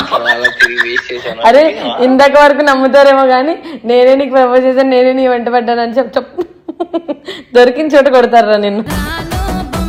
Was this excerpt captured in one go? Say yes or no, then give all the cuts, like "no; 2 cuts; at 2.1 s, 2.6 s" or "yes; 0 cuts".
yes; 0 cuts